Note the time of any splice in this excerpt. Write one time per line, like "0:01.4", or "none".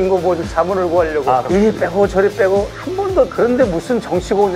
0:01.5
0:03.3